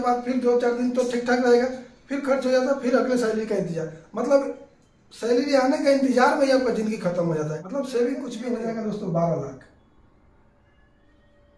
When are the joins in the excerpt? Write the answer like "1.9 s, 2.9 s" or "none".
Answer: 8.4 s